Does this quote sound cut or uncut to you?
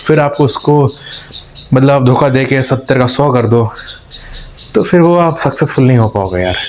uncut